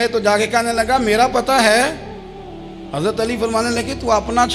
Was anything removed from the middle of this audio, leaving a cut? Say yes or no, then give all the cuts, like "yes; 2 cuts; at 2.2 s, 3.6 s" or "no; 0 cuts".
no; 0 cuts